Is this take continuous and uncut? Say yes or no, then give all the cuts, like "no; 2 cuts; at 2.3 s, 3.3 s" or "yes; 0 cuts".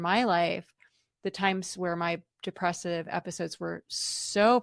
yes; 0 cuts